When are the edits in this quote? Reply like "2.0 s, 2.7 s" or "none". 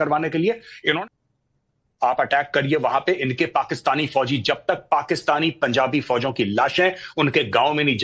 1.0 s